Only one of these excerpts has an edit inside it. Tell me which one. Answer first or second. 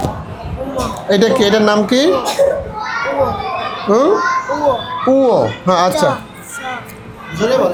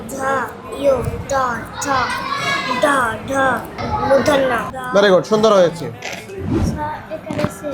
second